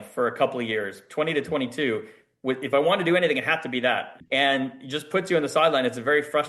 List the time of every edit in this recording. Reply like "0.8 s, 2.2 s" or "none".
4.2 s

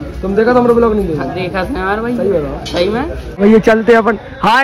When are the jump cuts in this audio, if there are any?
3.2 s

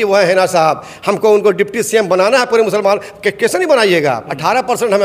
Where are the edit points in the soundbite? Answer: none

